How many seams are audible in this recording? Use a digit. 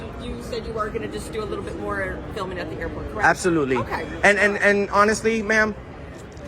1